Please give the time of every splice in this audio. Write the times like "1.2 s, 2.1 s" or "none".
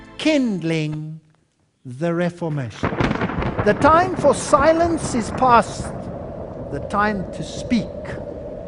1.9 s